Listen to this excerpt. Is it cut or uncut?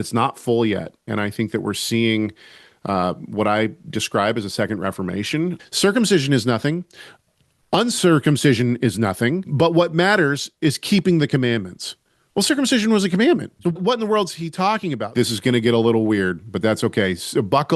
cut